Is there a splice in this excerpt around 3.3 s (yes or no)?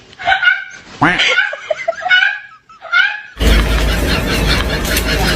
yes